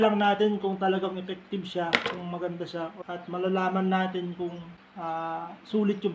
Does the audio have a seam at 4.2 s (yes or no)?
no